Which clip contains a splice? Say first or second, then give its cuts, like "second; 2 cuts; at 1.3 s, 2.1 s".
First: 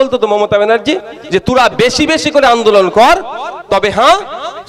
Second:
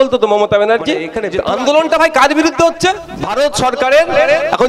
second; 2 cuts; at 1.1 s, 3.1 s